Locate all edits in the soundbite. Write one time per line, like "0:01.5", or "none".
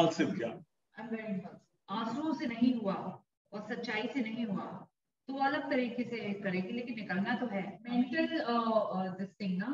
0:01.8
0:07.8